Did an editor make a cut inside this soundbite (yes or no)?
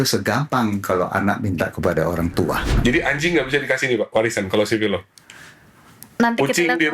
yes